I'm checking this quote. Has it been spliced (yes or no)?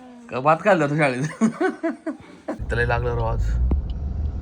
yes